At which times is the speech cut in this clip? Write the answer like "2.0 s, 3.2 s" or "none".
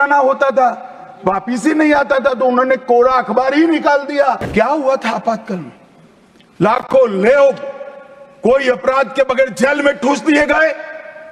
4.4 s